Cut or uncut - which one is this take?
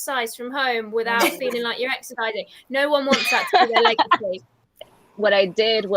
cut